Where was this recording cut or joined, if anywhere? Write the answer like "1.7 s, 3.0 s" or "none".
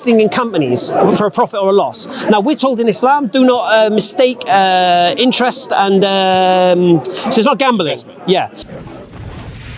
8.6 s